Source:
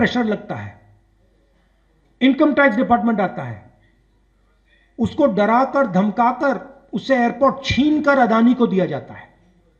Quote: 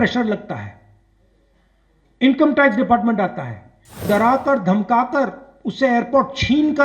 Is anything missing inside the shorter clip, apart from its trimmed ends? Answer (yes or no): yes